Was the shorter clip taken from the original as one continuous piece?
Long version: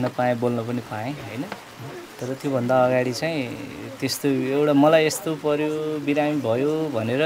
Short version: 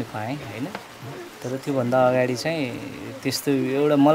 yes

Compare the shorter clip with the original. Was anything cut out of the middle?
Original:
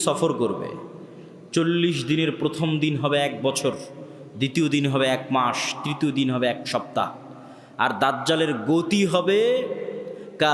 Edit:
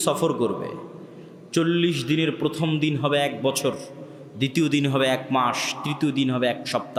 no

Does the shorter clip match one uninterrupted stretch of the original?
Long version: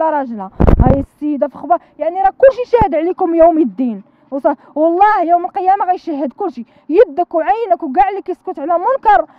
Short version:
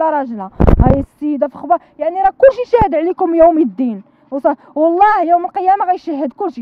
yes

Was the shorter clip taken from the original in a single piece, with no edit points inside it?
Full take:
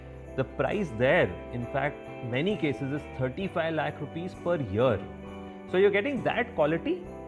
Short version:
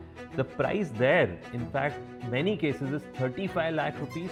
yes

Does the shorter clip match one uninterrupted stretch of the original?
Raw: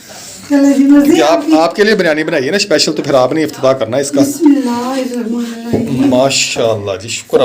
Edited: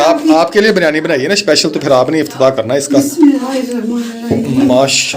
no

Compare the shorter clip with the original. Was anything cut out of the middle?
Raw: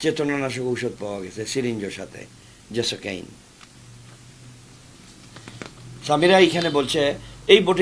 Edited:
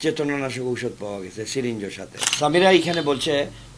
yes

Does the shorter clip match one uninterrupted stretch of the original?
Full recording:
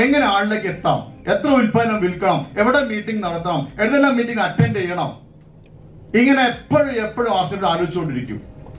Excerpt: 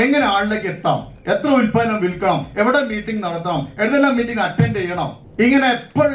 no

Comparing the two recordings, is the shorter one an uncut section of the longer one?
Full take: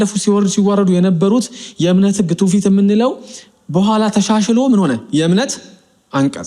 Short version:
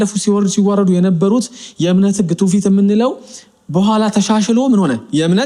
yes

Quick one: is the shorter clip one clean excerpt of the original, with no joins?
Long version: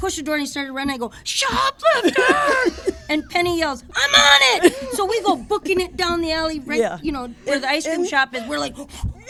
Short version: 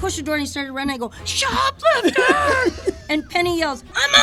yes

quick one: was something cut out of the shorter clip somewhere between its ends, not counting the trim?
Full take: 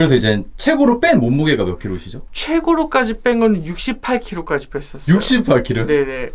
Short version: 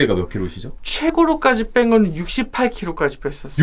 no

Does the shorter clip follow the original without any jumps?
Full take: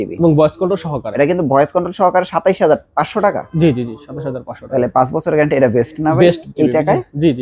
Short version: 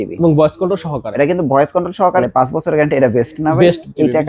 no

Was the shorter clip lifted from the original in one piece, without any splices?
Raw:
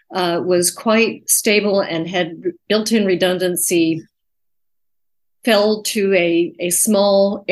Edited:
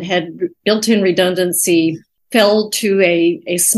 no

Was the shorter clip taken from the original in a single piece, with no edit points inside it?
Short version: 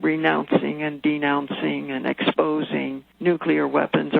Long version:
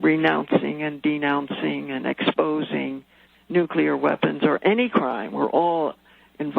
no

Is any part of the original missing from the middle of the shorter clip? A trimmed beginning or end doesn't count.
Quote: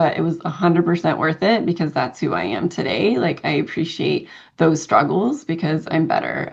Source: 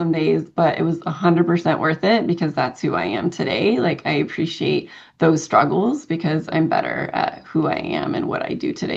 no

